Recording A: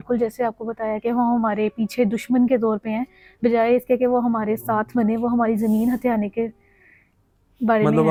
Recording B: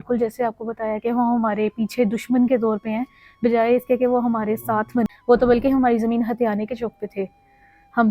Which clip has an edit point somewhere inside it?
B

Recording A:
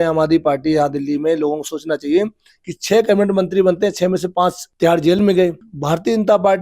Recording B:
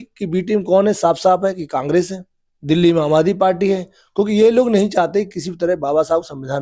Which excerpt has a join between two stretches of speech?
A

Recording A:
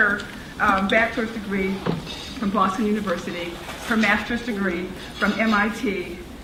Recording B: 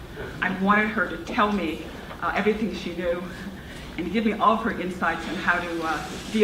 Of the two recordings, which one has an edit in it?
B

